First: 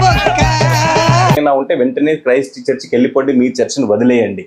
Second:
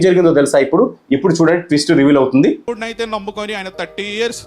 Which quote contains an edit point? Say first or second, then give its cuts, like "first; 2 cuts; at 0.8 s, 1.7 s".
first; 1 cut; at 1.4 s